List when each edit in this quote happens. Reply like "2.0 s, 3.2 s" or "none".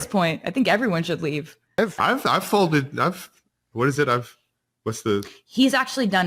1.7 s